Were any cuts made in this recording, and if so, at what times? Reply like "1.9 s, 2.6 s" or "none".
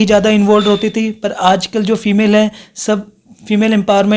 none